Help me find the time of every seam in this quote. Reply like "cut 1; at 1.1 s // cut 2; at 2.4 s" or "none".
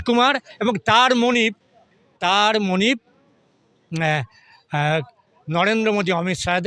none